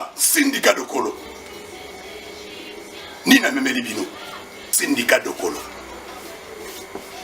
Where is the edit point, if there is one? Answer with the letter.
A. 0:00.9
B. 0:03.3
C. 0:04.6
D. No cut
C